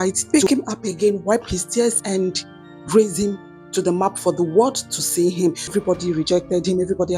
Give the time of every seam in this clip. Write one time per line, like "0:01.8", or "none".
0:05.7